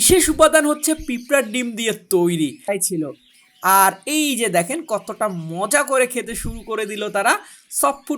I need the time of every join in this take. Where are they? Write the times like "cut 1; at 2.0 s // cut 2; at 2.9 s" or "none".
cut 1; at 2.7 s